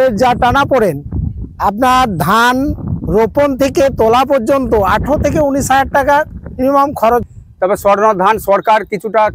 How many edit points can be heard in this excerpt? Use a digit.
1